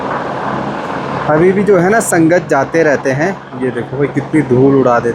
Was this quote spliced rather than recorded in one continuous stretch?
no; 0 cuts

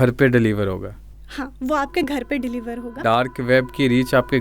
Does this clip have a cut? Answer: yes; 1 cut; at 2.9 s

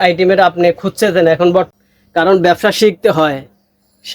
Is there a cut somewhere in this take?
yes; 1 cut; at 1.7 s

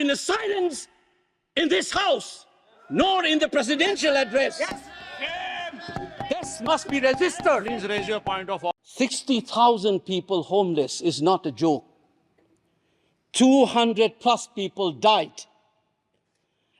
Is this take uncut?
no; 1 cut; at 8.8 s

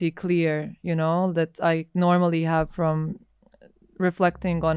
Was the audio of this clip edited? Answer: no; 0 cuts

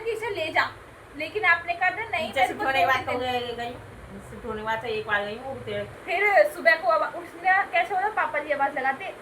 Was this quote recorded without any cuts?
no; 1 cut; at 5.9 s

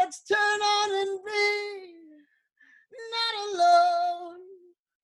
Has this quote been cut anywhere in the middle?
no; 0 cuts

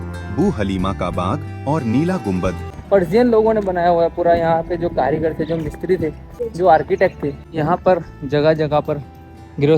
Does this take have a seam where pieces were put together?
yes; 3 cuts; at 2.7 s, 6.3 s, 7.4 s

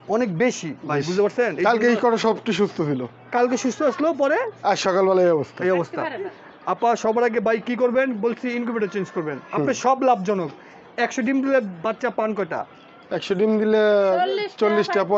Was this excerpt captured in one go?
no; 1 cut; at 6.4 s

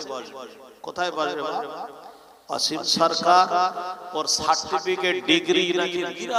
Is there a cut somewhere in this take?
no; 0 cuts

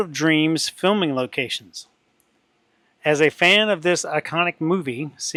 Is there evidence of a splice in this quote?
no; 0 cuts

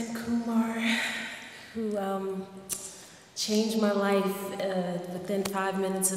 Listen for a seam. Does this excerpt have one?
no; 0 cuts

